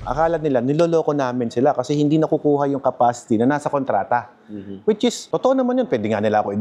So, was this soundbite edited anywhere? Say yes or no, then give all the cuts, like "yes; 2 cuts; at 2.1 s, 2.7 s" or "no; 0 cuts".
no; 0 cuts